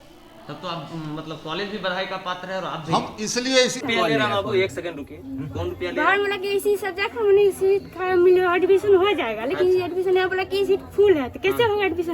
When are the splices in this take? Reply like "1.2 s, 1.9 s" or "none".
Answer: 3.8 s